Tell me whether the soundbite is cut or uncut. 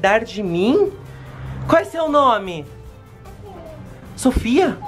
uncut